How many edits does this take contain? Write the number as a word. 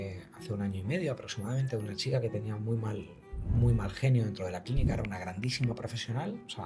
zero